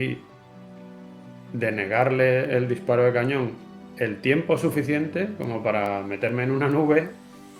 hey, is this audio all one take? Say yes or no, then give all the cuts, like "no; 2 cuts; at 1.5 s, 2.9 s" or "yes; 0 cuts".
yes; 0 cuts